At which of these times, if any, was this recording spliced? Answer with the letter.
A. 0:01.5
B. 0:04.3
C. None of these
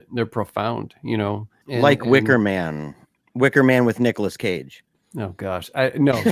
A